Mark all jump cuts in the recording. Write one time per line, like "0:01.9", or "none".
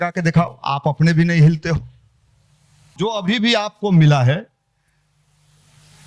0:03.0